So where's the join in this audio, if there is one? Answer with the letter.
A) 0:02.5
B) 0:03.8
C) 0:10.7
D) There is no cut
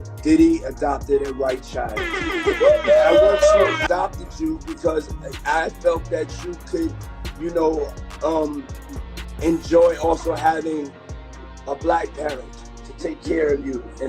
B